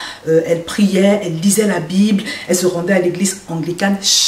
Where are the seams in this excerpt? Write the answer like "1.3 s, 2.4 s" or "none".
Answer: none